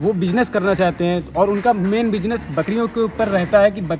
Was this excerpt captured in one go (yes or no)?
yes